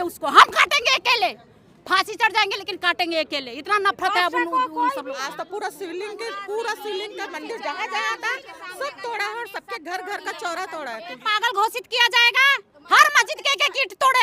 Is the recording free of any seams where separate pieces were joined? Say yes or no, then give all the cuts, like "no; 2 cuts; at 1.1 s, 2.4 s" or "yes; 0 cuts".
no; 2 cuts; at 5.1 s, 11.2 s